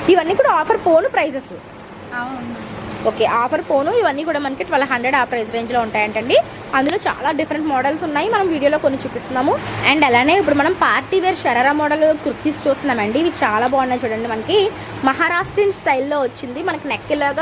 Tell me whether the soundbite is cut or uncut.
uncut